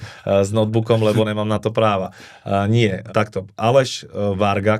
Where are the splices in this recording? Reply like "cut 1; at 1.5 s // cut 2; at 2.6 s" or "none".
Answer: none